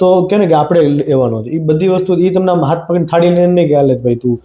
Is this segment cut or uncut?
uncut